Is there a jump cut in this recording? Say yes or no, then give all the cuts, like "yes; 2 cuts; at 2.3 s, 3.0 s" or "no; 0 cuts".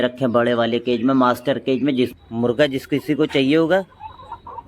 yes; 1 cut; at 2.1 s